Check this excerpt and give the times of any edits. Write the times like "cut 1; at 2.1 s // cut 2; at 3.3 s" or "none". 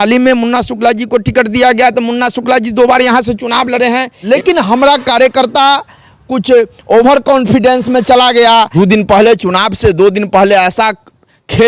cut 1; at 4.3 s // cut 2; at 8.7 s

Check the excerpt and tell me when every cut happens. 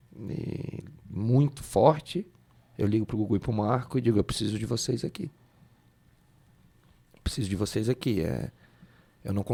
none

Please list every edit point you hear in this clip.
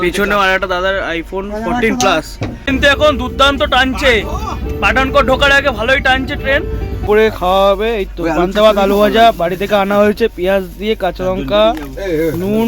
cut 1; at 2.6 s // cut 2; at 7.0 s

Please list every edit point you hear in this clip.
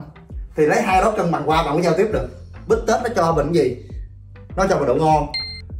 cut 1; at 2.5 s

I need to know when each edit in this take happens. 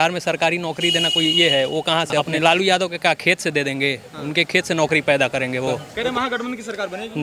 cut 1; at 2.3 s // cut 2; at 5.9 s

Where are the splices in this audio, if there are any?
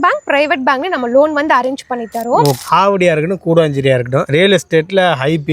cut 1; at 2.6 s

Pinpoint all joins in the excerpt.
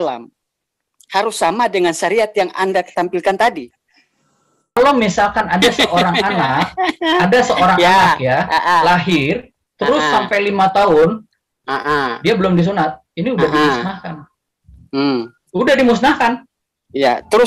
cut 1; at 4.8 s

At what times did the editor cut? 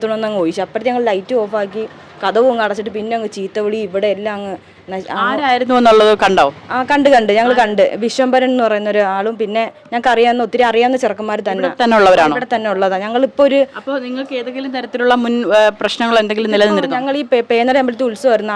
none

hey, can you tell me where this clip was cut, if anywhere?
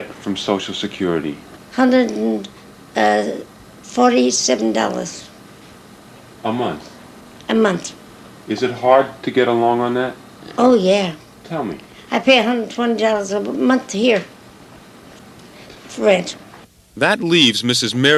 cut 1; at 2.1 s

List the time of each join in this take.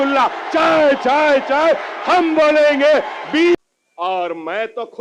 cut 1; at 3.5 s

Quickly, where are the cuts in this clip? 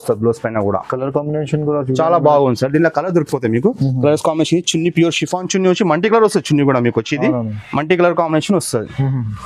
none

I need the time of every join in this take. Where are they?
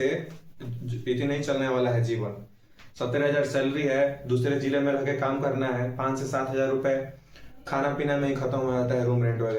none

